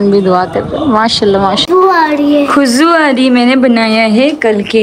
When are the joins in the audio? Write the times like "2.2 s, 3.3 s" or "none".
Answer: 1.6 s